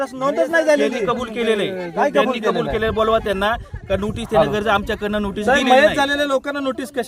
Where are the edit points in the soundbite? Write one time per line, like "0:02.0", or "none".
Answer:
0:00.9